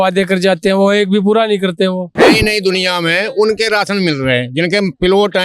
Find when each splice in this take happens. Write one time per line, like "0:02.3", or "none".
0:02.1